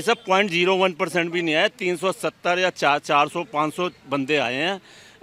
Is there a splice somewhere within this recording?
no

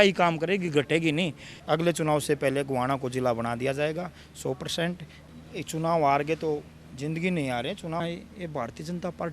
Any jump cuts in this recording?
yes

